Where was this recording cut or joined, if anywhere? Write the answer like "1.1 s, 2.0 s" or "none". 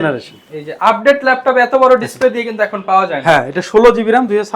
none